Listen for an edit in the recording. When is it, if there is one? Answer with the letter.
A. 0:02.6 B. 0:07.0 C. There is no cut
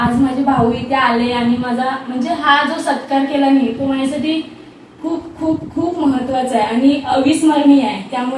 C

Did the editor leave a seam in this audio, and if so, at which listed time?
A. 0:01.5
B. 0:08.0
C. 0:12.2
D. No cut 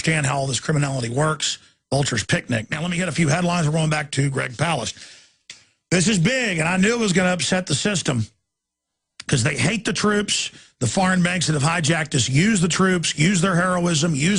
C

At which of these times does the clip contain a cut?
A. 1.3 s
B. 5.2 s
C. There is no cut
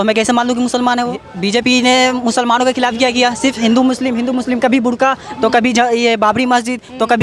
A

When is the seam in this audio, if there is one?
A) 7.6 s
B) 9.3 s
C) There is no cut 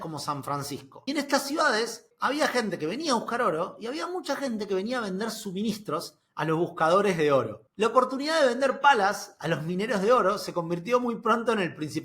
A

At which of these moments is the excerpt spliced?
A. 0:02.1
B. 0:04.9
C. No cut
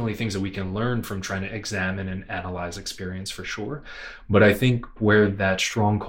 B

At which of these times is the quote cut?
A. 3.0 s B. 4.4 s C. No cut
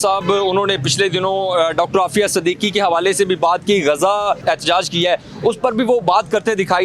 B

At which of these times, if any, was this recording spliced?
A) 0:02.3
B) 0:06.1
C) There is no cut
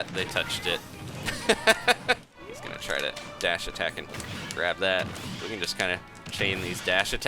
A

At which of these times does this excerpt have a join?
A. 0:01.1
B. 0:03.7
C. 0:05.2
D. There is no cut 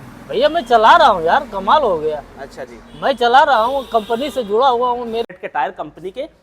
C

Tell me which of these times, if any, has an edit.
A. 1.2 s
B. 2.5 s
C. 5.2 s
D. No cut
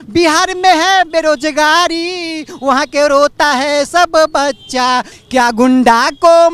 C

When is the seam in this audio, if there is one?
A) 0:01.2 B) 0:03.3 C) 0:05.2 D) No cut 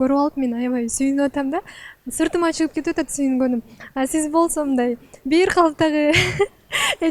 D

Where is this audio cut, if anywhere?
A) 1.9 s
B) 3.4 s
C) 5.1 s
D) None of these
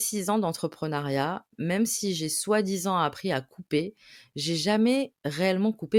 D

